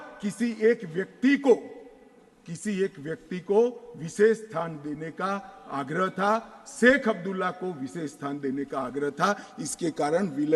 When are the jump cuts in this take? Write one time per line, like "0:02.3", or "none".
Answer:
none